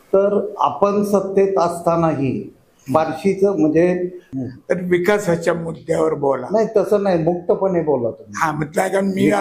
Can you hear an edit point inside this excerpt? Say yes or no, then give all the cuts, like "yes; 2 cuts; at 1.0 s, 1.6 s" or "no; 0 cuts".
yes; 1 cut; at 4.2 s